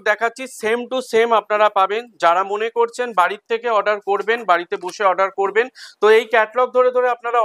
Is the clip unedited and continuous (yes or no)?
yes